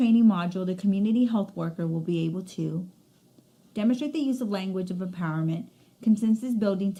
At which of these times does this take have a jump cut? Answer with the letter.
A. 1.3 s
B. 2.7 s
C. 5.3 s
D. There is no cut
D